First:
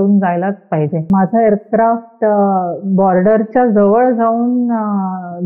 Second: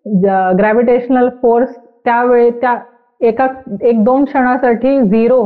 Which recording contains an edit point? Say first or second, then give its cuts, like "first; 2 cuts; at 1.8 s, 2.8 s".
first; 1 cut; at 1.1 s